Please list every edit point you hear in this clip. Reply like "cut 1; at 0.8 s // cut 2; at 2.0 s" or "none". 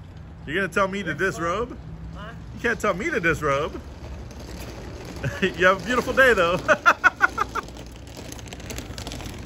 none